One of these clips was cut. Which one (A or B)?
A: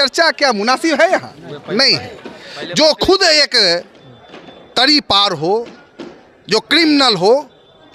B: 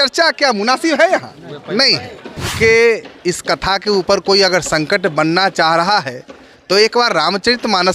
B